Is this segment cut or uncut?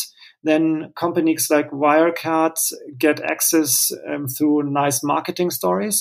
uncut